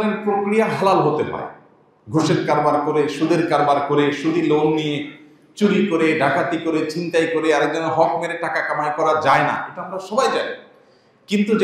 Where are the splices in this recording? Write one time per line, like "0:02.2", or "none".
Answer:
none